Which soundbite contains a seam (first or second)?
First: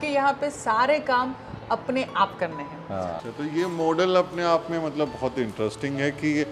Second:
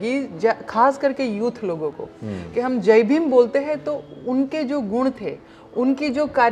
first